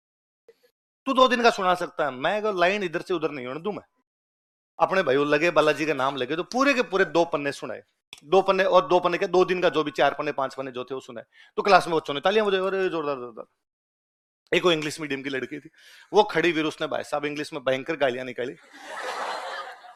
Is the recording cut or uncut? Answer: uncut